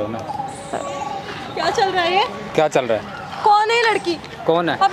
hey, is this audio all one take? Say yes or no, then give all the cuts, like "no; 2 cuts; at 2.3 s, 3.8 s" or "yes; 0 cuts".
yes; 0 cuts